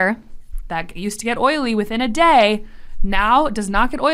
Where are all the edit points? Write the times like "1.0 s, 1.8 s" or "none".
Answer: none

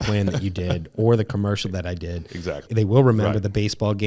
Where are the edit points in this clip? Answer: 2.6 s

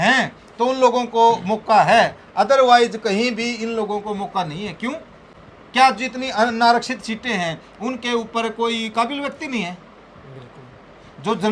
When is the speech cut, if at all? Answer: none

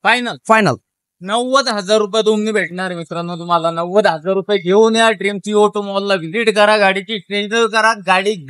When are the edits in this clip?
none

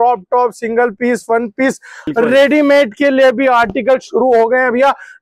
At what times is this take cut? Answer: 2.0 s

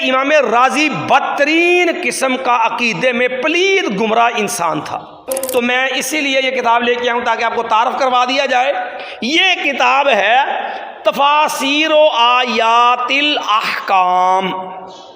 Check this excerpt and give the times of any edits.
5.3 s

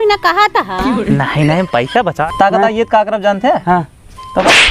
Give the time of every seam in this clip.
2.2 s

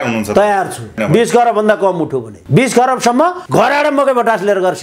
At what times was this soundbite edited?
1.0 s, 2.3 s, 3.4 s

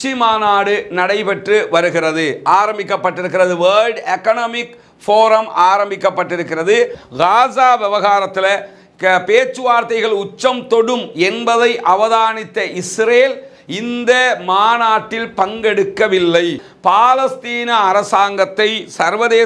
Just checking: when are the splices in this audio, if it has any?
7.0 s, 16.7 s

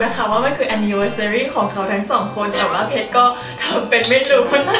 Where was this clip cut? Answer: none

